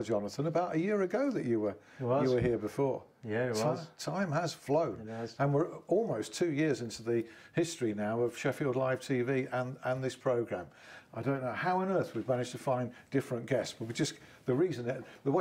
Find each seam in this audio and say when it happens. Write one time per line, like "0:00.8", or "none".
0:09.3